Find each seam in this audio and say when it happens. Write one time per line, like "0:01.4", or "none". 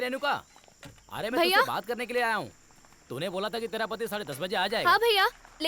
none

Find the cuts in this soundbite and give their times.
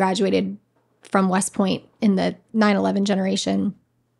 0:02.4

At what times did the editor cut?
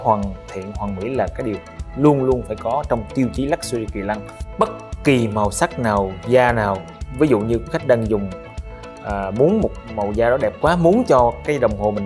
0:04.4

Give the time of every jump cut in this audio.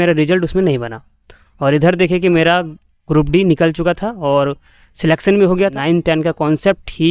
0:05.7

